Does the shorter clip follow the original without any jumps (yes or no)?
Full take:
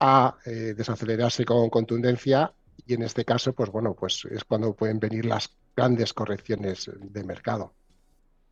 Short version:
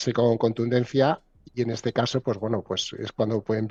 yes